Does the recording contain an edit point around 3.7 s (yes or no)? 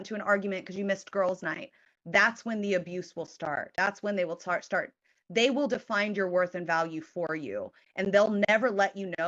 yes